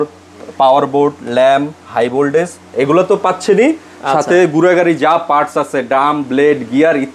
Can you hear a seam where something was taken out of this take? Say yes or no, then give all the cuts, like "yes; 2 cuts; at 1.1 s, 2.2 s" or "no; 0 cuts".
no; 0 cuts